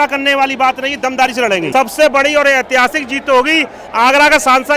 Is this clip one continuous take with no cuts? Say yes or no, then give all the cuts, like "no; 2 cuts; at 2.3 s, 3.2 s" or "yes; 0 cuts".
no; 1 cut; at 1.7 s